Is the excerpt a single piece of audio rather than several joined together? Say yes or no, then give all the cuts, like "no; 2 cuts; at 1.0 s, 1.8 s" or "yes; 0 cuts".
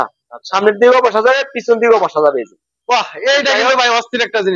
yes; 0 cuts